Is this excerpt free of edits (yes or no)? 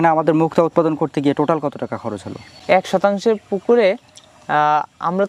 yes